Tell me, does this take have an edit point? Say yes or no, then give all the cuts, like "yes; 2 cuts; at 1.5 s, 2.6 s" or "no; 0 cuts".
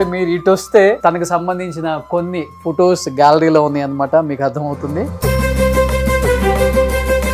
yes; 1 cut; at 1.0 s